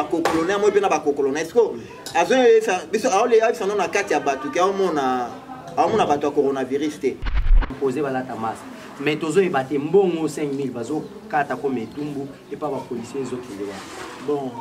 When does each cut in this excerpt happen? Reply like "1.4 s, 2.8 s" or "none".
7.6 s